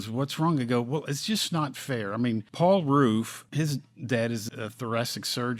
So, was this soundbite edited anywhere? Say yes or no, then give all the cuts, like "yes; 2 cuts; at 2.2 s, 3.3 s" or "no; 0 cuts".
yes; 3 cuts; at 2.5 s, 3.4 s, 4.5 s